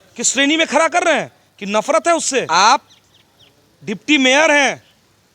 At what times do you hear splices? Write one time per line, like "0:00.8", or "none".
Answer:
0:02.5